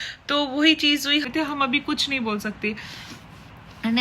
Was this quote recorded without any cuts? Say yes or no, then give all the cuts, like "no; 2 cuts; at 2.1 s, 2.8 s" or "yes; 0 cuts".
no; 1 cut; at 1.3 s